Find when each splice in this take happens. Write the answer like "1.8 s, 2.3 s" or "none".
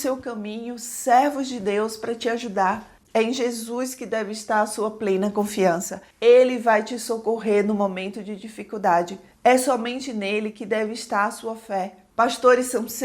2.9 s, 9.2 s